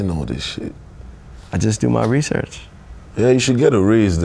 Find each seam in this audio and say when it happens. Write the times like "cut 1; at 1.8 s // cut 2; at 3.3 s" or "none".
none